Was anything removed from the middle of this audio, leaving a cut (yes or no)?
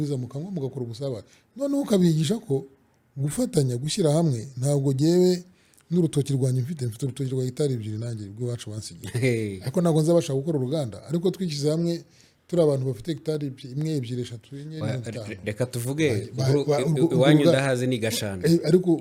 no